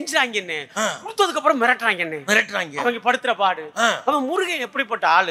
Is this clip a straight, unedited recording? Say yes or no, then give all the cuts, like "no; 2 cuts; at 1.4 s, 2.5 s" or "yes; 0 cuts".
yes; 0 cuts